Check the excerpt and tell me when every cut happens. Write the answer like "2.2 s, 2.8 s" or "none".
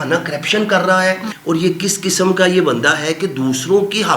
1.3 s